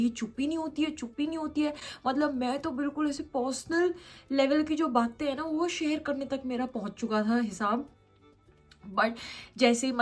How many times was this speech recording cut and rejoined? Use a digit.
0